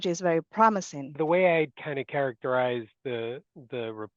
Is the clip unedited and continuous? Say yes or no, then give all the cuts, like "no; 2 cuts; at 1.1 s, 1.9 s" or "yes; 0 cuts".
no; 1 cut; at 1.2 s